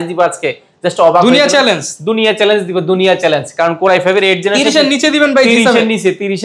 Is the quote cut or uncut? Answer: uncut